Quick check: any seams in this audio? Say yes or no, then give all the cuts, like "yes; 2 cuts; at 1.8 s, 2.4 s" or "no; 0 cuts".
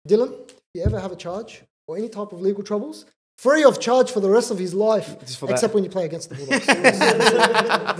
no; 0 cuts